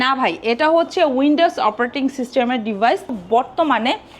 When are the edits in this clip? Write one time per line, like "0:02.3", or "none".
0:03.2